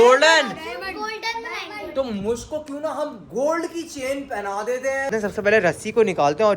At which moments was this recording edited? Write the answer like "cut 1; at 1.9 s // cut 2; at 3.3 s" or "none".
cut 1; at 5.1 s